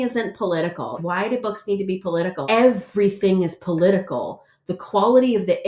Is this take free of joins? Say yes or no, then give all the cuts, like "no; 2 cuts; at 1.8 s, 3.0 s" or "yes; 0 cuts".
no; 2 cuts; at 1.0 s, 2.4 s